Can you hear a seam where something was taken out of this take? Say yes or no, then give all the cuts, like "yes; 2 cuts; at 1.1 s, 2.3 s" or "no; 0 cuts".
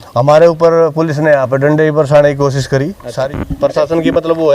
yes; 1 cut; at 3.1 s